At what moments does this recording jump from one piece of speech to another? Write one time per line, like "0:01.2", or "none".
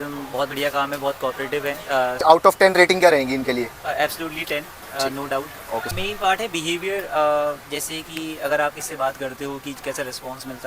0:02.2
0:05.9